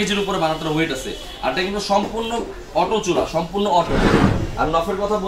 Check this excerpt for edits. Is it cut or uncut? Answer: cut